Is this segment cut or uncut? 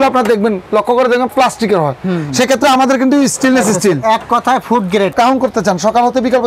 cut